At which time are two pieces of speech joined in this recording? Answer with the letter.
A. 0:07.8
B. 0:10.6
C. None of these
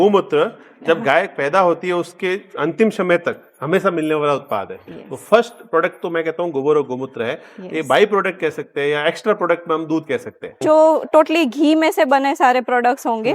B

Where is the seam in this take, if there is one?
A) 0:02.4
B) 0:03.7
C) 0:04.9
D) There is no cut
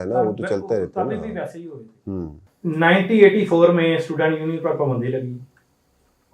A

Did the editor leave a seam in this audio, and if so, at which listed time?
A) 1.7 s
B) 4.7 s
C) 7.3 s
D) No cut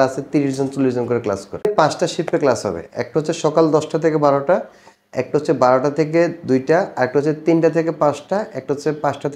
A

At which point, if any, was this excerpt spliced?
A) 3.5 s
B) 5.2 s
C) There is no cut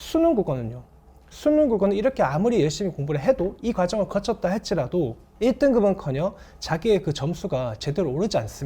B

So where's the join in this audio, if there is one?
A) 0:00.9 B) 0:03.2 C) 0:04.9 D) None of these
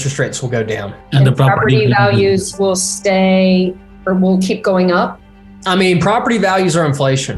A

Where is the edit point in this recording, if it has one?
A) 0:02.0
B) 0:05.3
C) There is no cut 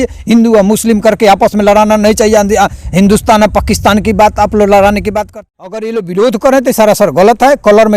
B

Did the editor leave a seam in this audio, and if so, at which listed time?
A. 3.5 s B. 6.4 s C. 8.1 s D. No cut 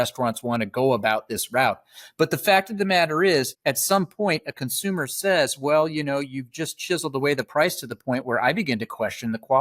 A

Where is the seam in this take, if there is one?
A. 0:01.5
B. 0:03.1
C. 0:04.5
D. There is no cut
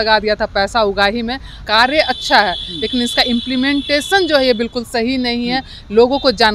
A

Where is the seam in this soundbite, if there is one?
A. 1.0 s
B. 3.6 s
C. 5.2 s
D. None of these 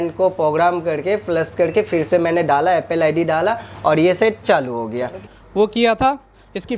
C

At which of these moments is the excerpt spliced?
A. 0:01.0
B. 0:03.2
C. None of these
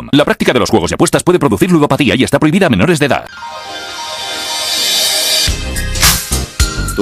B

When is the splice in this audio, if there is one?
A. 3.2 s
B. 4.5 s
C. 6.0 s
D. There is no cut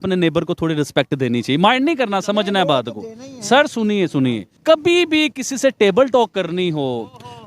B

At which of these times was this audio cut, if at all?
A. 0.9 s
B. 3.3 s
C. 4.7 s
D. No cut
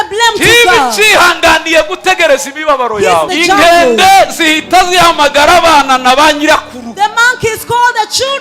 B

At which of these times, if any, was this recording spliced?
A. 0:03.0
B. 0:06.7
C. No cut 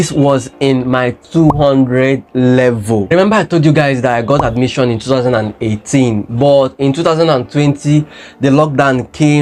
C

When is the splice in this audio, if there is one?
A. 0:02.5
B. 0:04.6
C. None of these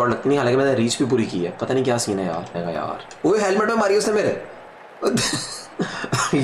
A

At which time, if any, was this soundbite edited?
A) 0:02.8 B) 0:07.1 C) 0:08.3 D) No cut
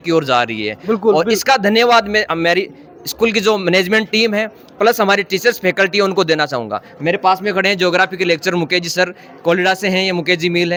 D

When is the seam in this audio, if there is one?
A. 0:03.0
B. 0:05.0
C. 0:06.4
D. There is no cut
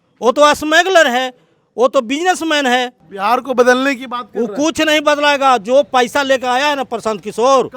A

